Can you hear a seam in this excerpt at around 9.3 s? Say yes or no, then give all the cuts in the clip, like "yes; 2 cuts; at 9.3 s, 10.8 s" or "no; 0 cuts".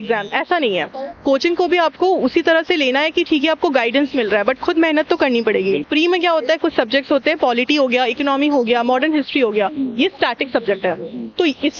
no; 1 cut; at 5.8 s